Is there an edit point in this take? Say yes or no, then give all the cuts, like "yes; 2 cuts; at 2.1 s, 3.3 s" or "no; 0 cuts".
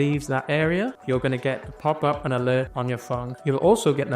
yes; 2 cuts; at 1.0 s, 3.1 s